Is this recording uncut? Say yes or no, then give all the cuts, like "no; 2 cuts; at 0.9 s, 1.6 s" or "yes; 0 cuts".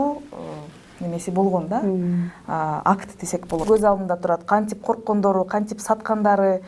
no; 1 cut; at 3.6 s